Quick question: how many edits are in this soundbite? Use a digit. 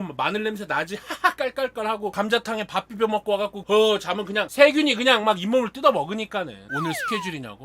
2